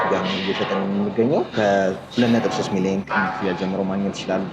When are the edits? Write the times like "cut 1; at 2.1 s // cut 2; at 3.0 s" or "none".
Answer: cut 1; at 1.5 s // cut 2; at 3.1 s